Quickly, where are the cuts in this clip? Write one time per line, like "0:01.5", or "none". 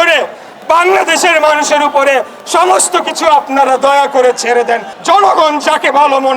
0:04.9